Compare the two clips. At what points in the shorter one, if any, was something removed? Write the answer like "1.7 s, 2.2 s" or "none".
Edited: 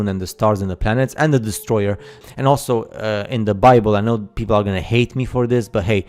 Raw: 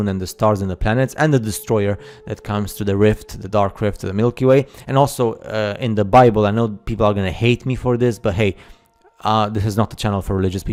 2.3 s